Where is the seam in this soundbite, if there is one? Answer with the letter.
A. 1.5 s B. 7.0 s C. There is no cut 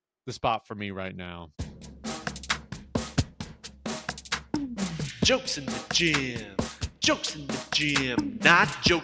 A